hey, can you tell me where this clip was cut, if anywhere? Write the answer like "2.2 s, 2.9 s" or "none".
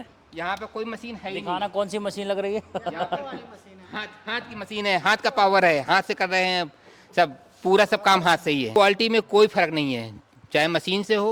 8.7 s

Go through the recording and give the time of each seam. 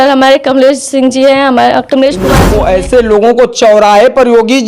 2.4 s

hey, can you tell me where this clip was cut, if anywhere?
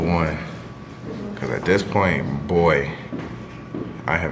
none

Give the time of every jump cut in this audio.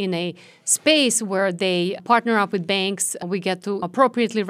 2.0 s, 3.5 s

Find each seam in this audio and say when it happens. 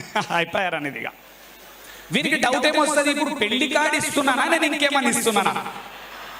none

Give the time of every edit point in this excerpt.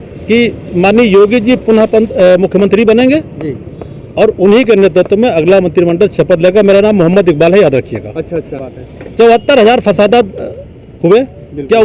8.7 s

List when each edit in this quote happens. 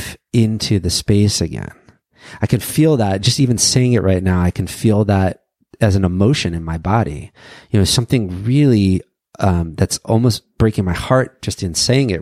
none

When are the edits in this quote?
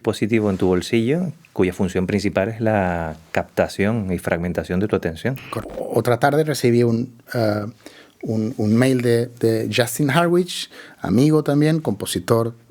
5.5 s

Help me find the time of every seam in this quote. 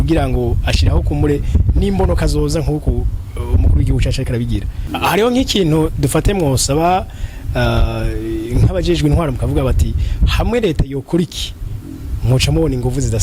4.8 s

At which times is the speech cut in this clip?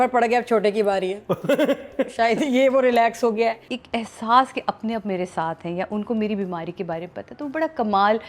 3.7 s

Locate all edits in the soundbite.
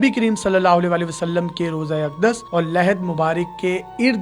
none

